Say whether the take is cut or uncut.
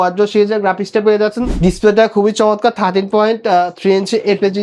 cut